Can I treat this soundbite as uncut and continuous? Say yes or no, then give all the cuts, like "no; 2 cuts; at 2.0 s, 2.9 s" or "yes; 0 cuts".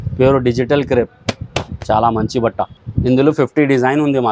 no; 1 cut; at 2.8 s